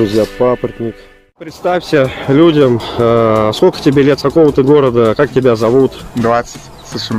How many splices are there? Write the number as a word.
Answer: one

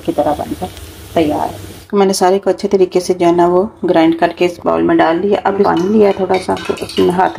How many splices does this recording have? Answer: two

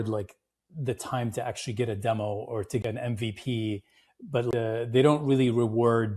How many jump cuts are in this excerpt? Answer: two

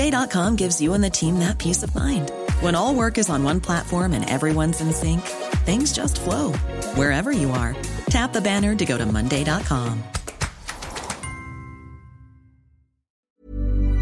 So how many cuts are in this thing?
one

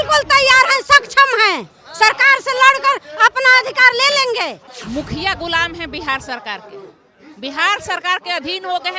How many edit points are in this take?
one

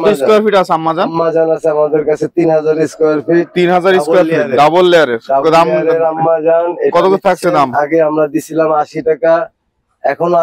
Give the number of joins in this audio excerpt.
zero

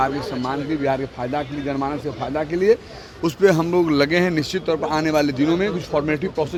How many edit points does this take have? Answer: zero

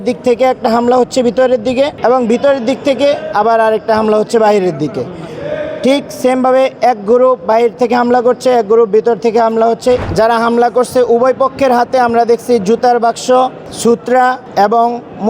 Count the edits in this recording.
three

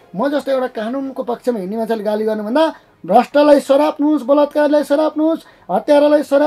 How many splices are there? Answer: zero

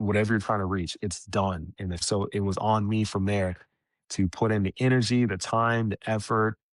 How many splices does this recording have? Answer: one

